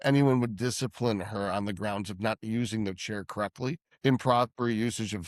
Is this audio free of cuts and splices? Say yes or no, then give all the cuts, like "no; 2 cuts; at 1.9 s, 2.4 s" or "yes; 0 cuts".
no; 1 cut; at 3.9 s